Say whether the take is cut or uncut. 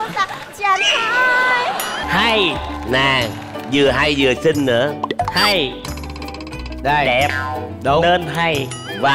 cut